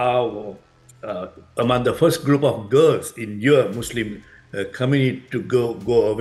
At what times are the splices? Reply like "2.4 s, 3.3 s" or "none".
none